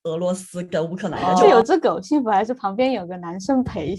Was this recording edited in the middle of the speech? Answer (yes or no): yes